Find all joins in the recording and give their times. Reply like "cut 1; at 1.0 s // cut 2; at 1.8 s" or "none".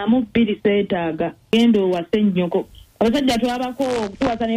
cut 1; at 1.5 s